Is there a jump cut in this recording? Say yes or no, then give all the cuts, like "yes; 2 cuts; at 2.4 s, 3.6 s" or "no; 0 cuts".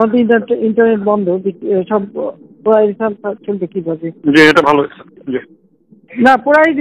no; 0 cuts